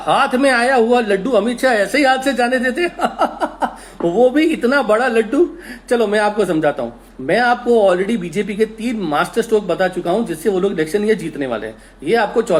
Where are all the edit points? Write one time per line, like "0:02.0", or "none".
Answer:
none

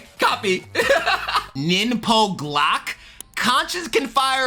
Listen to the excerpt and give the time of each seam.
0:01.5

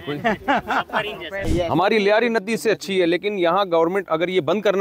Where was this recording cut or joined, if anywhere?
0:01.5

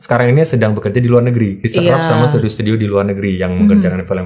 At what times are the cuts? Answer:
0:01.6

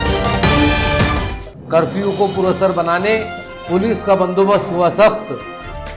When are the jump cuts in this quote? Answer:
0:01.3

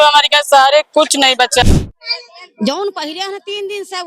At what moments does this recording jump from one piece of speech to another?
0:01.6

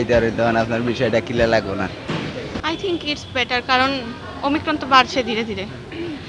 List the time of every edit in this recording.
none

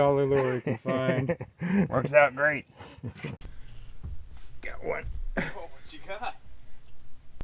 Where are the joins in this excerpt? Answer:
0:03.4

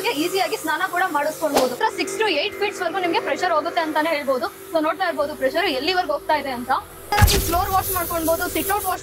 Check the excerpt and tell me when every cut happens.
0:01.8
0:07.1

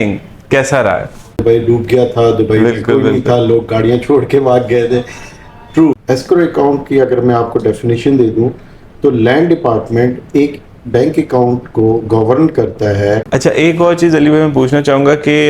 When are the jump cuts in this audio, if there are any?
0:01.4
0:06.0
0:13.2

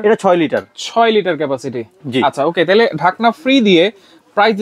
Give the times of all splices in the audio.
none

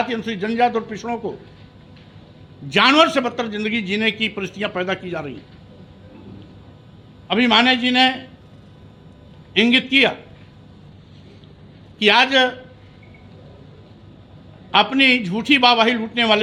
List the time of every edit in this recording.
none

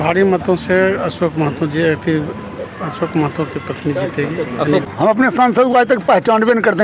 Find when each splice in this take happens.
0:04.8

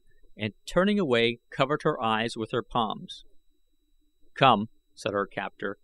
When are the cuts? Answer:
none

